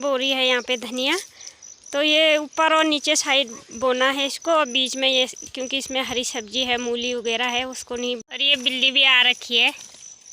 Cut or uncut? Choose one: cut